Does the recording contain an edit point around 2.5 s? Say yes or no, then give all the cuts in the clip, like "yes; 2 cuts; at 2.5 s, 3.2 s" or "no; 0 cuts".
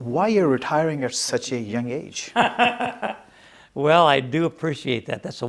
yes; 1 cut; at 2.5 s